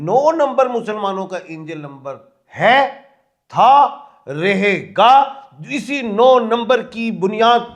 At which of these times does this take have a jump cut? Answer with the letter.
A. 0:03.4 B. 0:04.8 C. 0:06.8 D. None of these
D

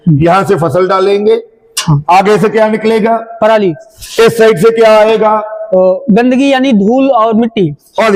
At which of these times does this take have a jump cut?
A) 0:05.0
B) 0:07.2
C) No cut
C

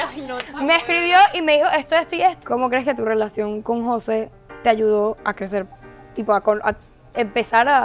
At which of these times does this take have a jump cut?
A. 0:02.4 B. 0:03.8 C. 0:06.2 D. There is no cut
A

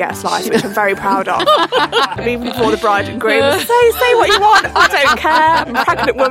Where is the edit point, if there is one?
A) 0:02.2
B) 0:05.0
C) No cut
A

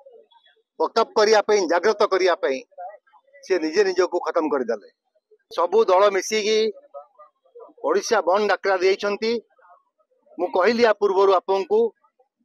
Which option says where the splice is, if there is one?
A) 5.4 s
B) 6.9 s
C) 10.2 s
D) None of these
A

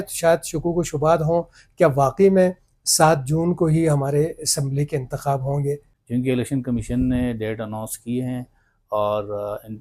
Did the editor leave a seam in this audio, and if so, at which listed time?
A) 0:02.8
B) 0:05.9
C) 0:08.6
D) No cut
B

